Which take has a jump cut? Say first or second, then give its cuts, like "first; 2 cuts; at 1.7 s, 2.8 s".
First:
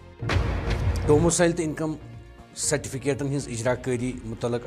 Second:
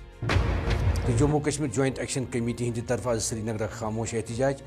second; 1 cut; at 1.0 s